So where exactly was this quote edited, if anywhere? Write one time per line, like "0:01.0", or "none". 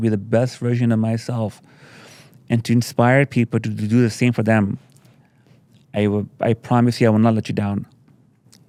none